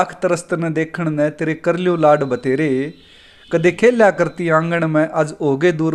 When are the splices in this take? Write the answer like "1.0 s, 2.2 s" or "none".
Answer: none